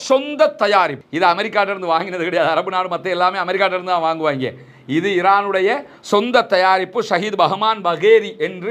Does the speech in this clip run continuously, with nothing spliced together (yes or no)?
yes